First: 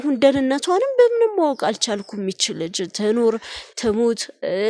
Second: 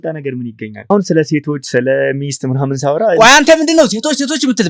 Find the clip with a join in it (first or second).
second